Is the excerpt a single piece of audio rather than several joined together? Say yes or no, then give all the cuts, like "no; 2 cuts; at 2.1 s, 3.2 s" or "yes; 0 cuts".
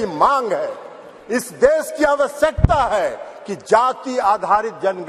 yes; 0 cuts